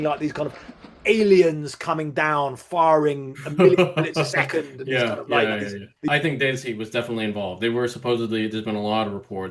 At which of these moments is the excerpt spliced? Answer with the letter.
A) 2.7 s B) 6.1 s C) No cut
B